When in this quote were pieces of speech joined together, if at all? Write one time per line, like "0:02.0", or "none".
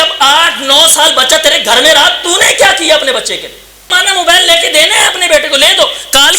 0:04.0